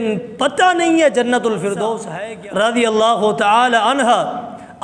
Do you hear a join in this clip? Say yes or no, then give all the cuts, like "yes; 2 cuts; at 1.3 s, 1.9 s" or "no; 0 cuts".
yes; 1 cut; at 2.1 s